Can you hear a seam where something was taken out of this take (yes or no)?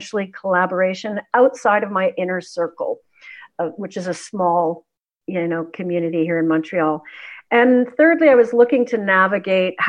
no